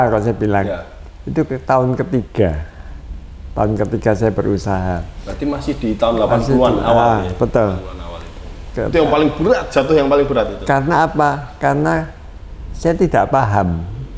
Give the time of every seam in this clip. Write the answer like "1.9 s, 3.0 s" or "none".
none

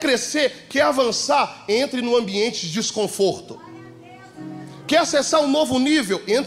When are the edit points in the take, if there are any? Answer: none

